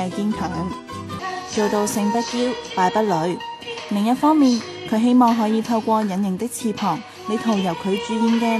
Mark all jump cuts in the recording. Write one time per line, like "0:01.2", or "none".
0:01.1